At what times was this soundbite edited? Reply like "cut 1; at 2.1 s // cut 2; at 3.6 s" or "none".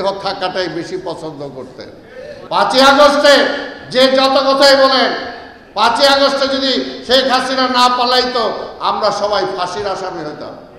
cut 1; at 2.3 s